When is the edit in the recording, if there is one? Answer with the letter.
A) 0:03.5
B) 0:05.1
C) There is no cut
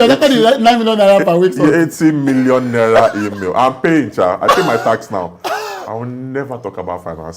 C